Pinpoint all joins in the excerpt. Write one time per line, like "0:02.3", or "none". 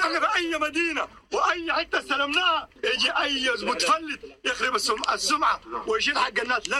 0:01.2